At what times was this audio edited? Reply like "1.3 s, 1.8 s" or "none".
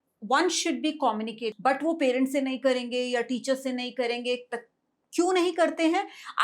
1.5 s